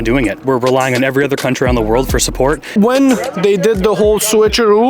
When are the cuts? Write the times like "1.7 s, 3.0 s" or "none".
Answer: 2.7 s